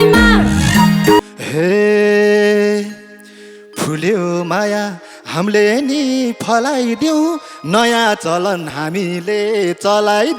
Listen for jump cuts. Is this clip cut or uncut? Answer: cut